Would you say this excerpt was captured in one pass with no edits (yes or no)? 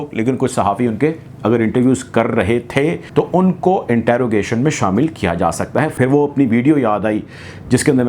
no